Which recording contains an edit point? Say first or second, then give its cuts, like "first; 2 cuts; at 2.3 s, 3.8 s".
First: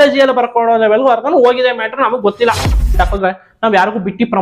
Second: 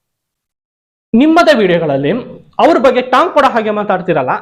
first; 1 cut; at 2.9 s